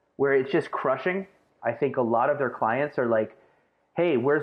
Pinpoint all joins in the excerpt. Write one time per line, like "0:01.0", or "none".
0:01.5